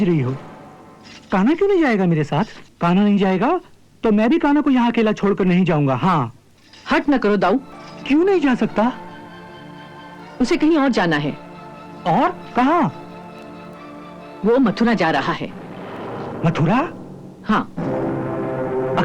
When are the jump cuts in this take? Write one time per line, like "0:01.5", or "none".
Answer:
0:02.6
0:07.7